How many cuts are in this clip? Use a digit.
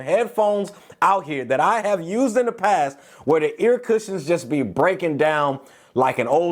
0